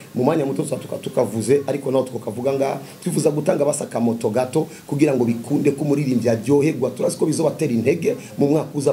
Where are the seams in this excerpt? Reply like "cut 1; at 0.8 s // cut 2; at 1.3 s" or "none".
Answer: none